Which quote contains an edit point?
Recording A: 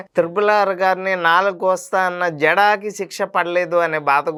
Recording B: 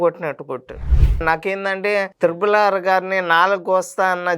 B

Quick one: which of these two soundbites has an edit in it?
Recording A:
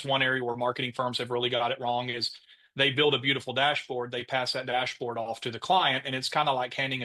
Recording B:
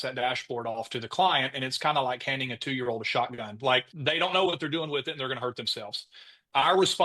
B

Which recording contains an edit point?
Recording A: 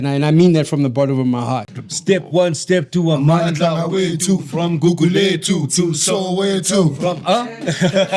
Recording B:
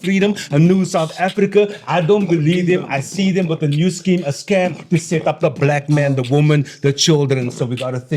A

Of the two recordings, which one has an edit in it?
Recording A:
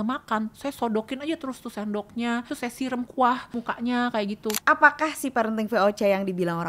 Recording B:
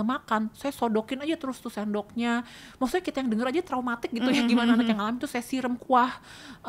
A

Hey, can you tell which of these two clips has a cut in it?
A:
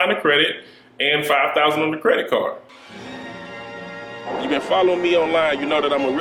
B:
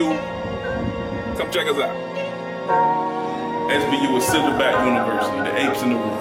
A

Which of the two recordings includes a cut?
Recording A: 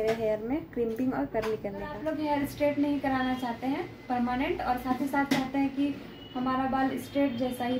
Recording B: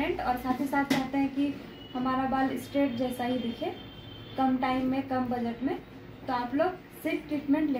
A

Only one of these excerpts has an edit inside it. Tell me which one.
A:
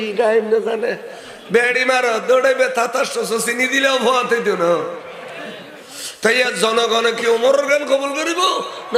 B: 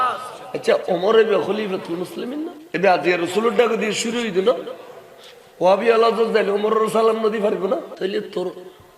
B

